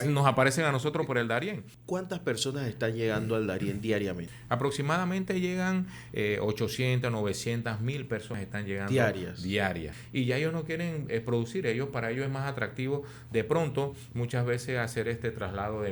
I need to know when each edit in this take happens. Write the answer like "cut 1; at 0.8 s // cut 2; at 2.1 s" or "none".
cut 1; at 1.7 s // cut 2; at 4.3 s // cut 3; at 8.3 s // cut 4; at 10.0 s

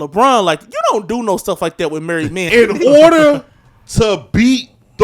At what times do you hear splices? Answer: cut 1; at 2.5 s

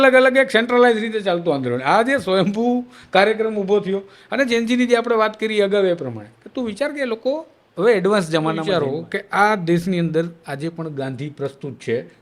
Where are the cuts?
cut 1; at 8.8 s

